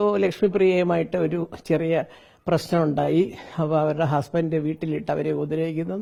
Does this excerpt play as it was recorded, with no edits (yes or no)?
yes